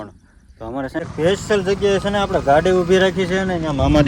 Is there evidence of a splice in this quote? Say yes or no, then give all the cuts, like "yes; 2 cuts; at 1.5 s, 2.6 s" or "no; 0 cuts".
yes; 1 cut; at 1.0 s